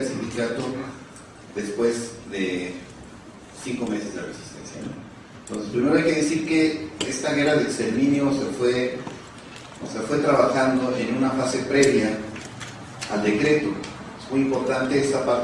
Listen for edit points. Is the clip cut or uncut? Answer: uncut